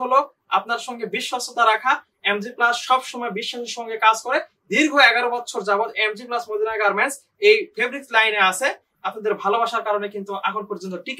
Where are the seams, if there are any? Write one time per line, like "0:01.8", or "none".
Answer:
none